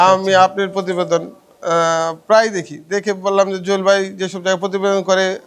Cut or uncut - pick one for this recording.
uncut